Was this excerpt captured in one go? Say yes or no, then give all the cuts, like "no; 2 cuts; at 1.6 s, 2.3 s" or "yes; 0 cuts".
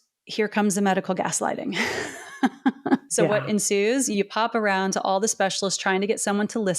no; 2 cuts; at 3.1 s, 4.1 s